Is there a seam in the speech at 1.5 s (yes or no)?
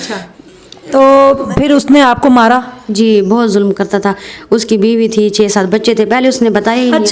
yes